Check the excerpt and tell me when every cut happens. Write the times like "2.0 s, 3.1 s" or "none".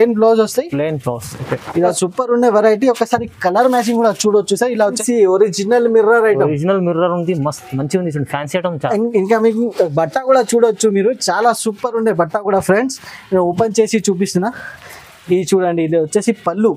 2.0 s, 5.0 s